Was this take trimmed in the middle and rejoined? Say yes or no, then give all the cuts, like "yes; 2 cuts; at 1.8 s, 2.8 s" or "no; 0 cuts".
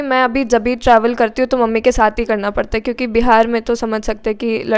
no; 0 cuts